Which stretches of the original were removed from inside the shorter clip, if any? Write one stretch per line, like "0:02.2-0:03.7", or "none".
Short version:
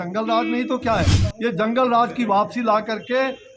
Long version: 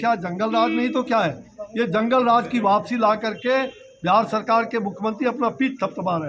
0:01.5-0:01.6